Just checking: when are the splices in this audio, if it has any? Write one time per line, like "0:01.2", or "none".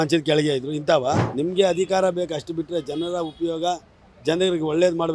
0:01.3